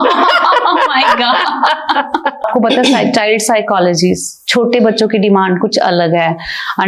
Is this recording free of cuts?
no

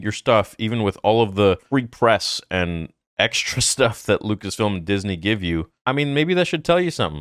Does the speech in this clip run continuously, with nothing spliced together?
yes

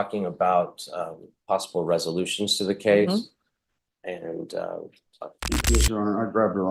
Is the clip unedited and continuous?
no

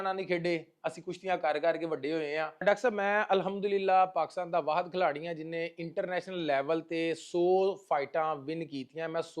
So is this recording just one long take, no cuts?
no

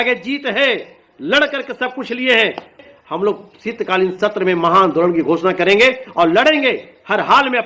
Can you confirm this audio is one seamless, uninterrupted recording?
no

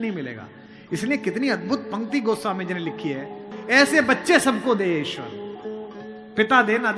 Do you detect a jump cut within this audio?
yes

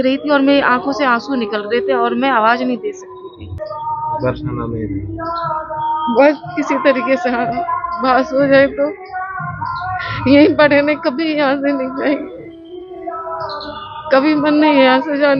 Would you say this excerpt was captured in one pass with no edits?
no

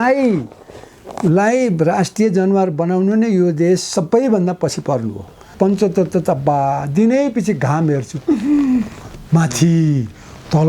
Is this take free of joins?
no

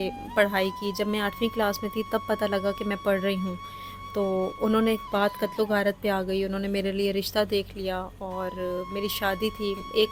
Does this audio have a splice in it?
no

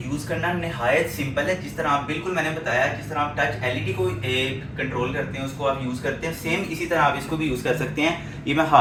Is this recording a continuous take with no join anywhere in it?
yes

